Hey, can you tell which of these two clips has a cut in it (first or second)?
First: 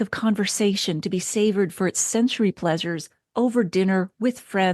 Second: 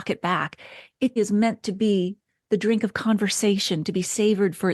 second